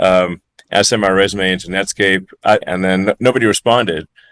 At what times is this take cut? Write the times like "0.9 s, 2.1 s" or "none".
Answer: 2.6 s